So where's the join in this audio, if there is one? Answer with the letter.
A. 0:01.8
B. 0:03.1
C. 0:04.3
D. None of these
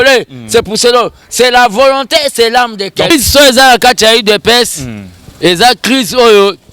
B